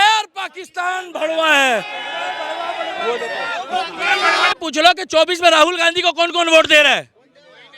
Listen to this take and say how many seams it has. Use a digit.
1